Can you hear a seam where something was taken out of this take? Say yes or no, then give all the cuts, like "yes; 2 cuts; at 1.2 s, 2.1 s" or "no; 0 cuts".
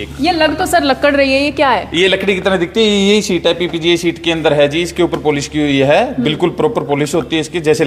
no; 0 cuts